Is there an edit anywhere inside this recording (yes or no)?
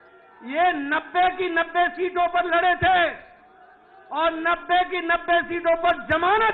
no